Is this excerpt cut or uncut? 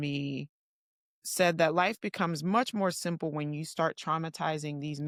uncut